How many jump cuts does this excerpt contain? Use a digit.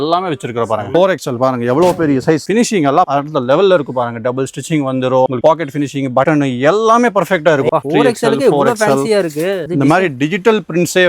4